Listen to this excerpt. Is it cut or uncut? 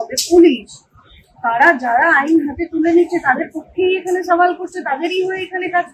uncut